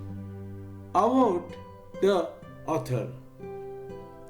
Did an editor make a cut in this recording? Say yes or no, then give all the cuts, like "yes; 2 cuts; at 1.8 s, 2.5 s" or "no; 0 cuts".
yes; 1 cut; at 0.9 s